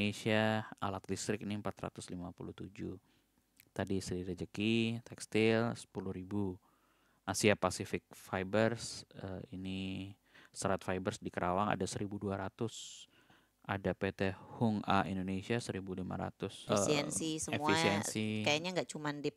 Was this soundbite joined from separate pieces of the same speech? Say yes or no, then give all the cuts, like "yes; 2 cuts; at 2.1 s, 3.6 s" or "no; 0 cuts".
yes; 1 cut; at 16.6 s